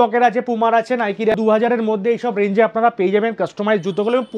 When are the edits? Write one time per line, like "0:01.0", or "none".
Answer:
0:01.4